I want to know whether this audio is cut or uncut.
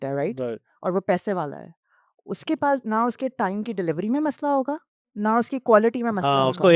uncut